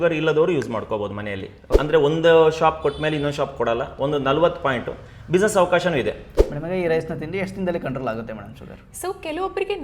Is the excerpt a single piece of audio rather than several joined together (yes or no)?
no